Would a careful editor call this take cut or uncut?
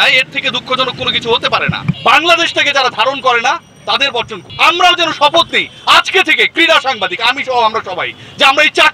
cut